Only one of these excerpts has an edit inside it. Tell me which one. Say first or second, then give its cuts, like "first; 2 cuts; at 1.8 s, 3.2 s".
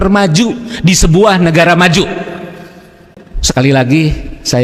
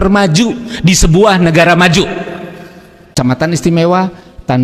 second; 1 cut; at 3.1 s